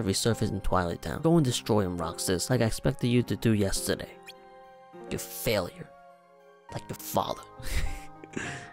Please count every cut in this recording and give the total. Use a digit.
1